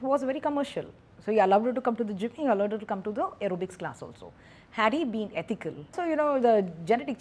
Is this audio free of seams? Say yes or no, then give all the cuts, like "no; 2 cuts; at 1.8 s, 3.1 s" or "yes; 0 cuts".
no; 1 cut; at 5.9 s